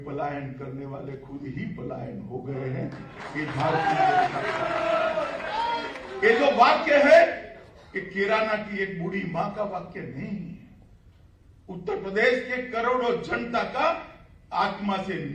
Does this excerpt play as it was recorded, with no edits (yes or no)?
yes